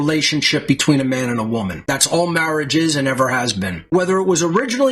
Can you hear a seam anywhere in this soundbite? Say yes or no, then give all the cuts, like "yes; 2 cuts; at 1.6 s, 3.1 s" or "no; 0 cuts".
yes; 1 cut; at 3.8 s